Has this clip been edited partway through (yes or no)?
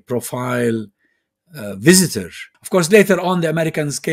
yes